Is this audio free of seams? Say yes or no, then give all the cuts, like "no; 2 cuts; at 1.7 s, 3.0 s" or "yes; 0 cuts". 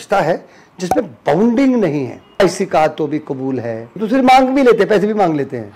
no; 2 cuts; at 2.4 s, 4.0 s